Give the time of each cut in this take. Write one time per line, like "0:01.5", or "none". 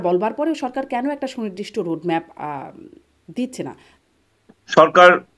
0:03.9